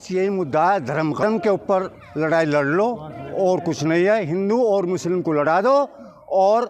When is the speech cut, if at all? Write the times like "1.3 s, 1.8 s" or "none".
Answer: 1.2 s